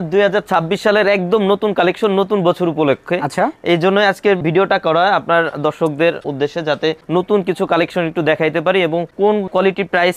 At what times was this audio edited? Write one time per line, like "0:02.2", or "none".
none